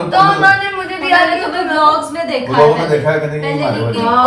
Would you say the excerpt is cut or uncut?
uncut